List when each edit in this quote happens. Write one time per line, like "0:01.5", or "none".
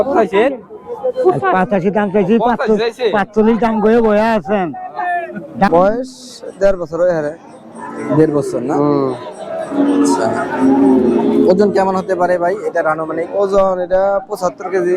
0:05.7